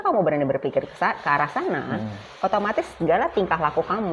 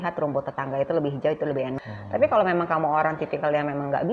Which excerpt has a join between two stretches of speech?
second; 1 cut; at 1.9 s

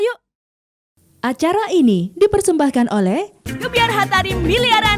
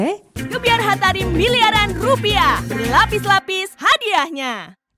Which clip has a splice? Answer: first; 1 cut; at 1.1 s

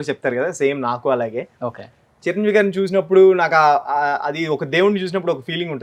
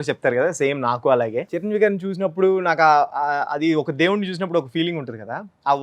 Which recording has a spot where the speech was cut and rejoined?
second; 1 cut; at 1.5 s

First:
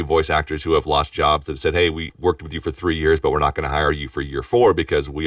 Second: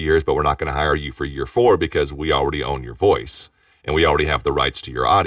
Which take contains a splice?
first; 1 cut; at 2.1 s

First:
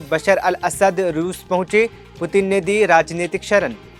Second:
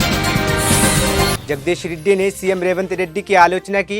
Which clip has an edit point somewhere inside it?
second; 1 cut; at 1.4 s

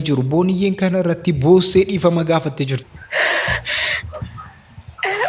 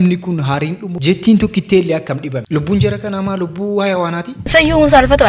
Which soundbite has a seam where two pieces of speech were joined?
second; 1 cut; at 4.3 s

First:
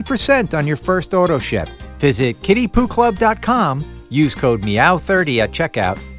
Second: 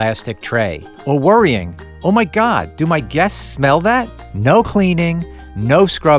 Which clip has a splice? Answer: second; 1 cut; at 4.2 s

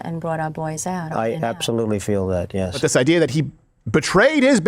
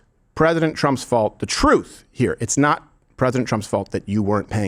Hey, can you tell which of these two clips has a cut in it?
first; 1 cut; at 2.8 s

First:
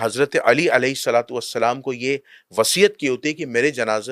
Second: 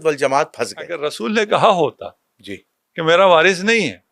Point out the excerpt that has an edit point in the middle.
second; 1 cut; at 1.0 s

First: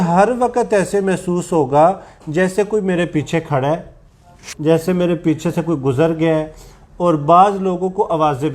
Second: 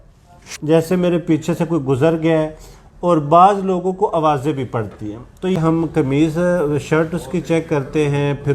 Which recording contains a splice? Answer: second; 1 cut; at 5.6 s

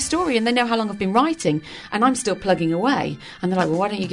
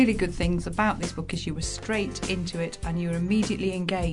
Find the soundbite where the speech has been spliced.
first; 1 cut; at 1.7 s

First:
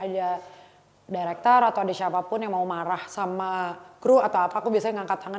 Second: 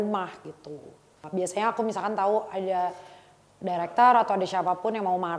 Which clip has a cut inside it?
second; 1 cut; at 1.2 s

